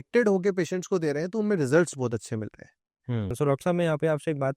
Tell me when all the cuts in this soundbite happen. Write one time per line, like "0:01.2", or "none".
0:03.3